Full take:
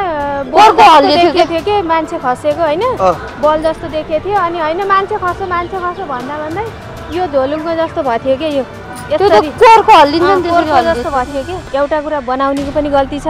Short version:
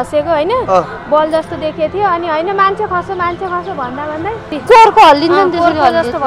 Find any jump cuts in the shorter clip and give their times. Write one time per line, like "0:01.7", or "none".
0:04.6